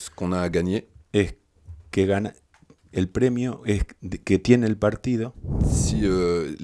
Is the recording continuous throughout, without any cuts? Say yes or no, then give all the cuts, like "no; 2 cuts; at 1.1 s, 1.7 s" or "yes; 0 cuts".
yes; 0 cuts